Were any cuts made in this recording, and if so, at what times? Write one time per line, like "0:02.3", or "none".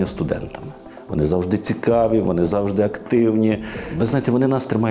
0:00.9
0:03.8